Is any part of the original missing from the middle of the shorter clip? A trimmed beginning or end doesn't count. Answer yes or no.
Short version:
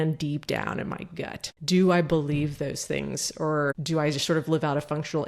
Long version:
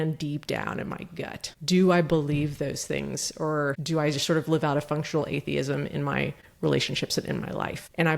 no